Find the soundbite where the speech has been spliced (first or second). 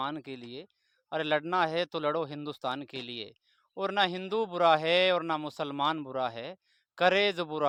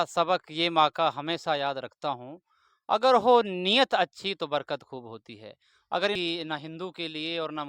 second